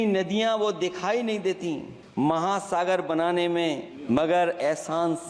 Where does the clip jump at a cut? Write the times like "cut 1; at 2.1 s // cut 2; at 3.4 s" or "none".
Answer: cut 1; at 2.0 s // cut 2; at 3.9 s